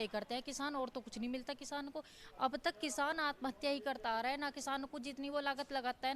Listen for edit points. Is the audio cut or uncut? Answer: uncut